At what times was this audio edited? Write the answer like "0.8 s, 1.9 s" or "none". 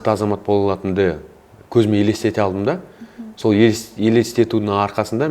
none